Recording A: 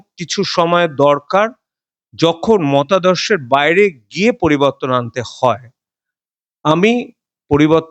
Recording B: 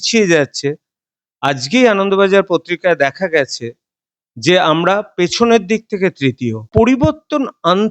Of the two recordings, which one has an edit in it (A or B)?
B